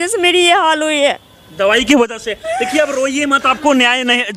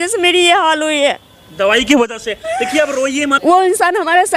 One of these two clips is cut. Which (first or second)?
second